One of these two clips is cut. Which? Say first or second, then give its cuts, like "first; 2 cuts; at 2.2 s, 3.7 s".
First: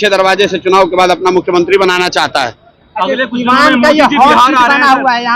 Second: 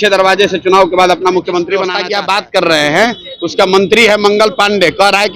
second; 1 cut; at 2.0 s